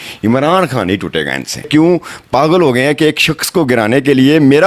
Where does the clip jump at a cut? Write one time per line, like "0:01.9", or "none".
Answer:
0:01.7